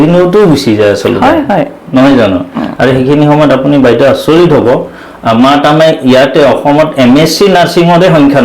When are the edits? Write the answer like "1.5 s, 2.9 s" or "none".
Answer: 2.7 s